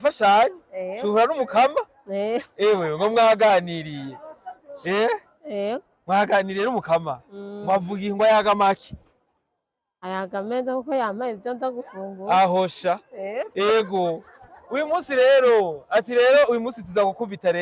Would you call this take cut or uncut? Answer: uncut